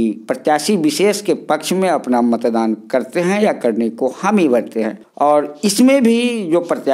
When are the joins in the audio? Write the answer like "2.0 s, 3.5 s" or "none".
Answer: 5.0 s